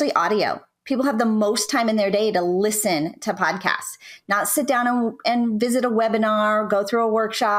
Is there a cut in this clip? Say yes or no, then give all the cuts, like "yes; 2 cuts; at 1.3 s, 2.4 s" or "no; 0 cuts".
no; 0 cuts